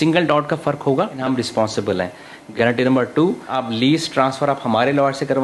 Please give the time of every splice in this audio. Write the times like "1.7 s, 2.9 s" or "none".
1.2 s, 2.4 s, 3.5 s